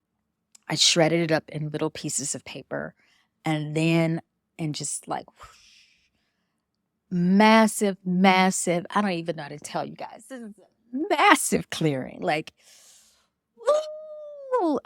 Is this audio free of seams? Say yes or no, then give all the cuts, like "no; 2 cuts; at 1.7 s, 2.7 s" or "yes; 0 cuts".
no; 1 cut; at 4.6 s